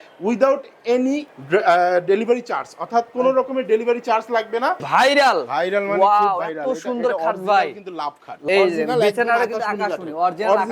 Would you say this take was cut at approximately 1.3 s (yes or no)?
yes